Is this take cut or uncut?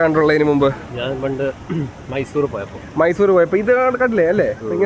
uncut